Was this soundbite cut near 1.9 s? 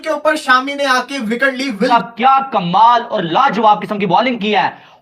yes; 1 cut; at 1.9 s

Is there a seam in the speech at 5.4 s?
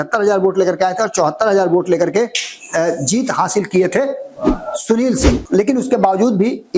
yes; 1 cut; at 5.4 s

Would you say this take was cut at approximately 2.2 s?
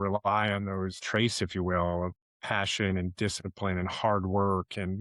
yes; 2 cuts; at 1.0 s, 2.2 s

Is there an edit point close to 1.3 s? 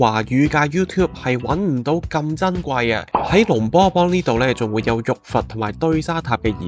no; 1 cut; at 3.1 s

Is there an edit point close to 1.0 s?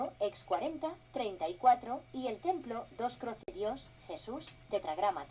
no; 1 cut; at 3.5 s

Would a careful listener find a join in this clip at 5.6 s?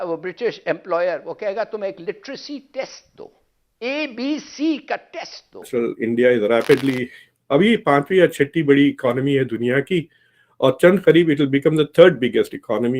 yes; 1 cut; at 5.6 s

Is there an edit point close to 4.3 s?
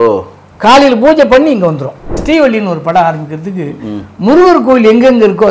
no; 1 cut; at 2.2 s

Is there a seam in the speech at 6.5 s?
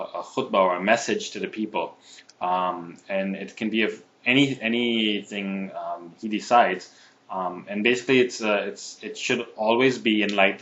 no; 1 cut; at 1.1 s

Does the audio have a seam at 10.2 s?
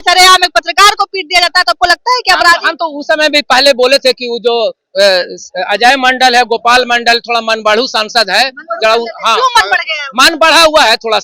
no; 0 cuts

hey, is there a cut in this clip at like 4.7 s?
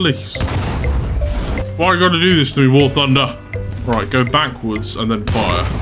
no; 1 cut; at 1.6 s

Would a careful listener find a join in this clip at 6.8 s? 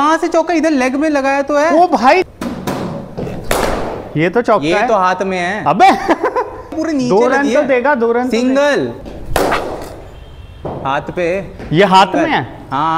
yes; 3 cuts; at 2.3 s, 6.8 s, 9.1 s

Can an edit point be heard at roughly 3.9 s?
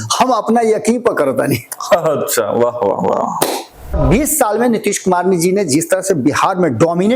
yes; 1 cut; at 3.9 s

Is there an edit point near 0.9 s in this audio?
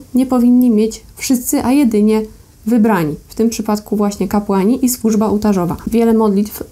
no; 0 cuts

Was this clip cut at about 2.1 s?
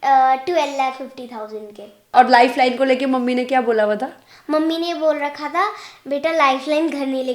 yes; 1 cut; at 2.1 s

